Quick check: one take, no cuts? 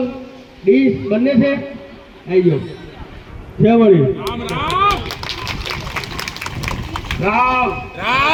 yes; 0 cuts

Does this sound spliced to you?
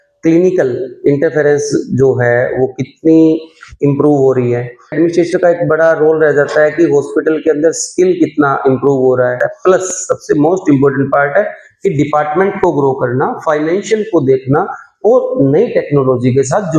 yes; 2 cuts; at 5.0 s, 9.4 s

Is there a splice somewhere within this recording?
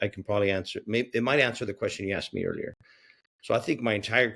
no; 0 cuts

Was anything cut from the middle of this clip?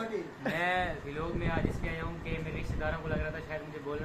no; 0 cuts

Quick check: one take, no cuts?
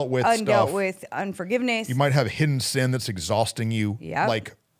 yes; 0 cuts

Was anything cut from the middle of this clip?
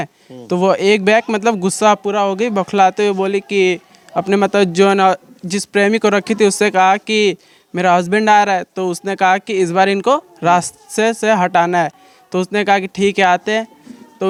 no; 0 cuts

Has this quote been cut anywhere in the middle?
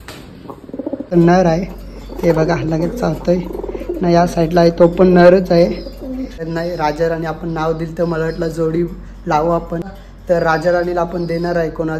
yes; 3 cuts; at 1.1 s, 6.3 s, 9.9 s

